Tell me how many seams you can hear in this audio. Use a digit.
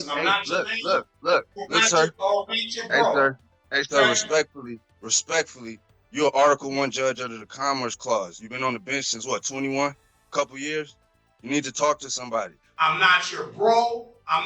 1